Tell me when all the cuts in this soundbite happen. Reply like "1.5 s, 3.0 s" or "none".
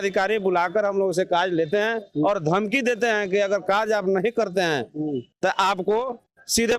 none